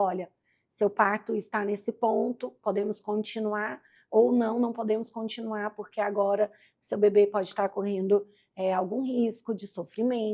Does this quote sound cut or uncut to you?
uncut